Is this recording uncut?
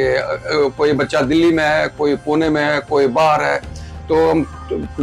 yes; 0 cuts

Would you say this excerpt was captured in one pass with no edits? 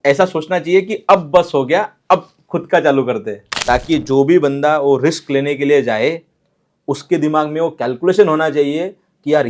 no; 1 cut; at 3.5 s

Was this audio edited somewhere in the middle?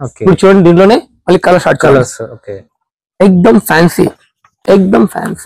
no; 0 cuts

